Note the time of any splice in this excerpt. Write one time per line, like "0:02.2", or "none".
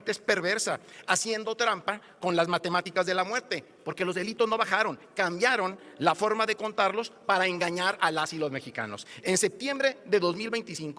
none